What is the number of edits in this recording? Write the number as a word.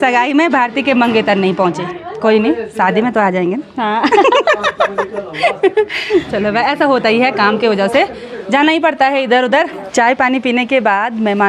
zero